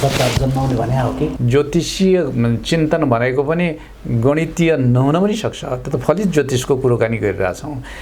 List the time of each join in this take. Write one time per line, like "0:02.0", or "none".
0:01.4